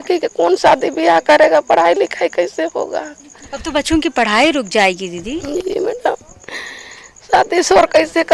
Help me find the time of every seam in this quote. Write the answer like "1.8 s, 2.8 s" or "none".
none